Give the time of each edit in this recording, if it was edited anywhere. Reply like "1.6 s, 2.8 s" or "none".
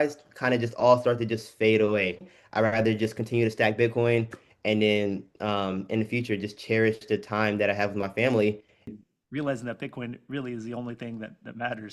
2.3 s, 8.8 s